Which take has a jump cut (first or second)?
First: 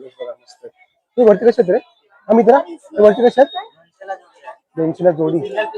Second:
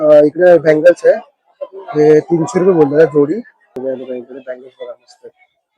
second